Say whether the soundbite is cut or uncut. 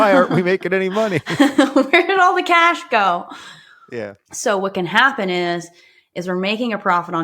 cut